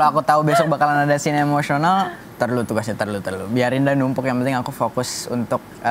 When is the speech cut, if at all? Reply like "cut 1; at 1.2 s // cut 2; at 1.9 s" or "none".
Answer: none